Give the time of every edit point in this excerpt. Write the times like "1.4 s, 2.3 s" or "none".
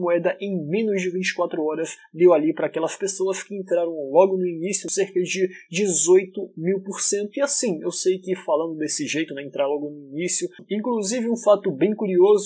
10.6 s